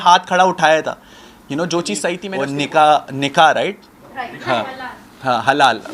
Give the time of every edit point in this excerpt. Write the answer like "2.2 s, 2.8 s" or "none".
2.3 s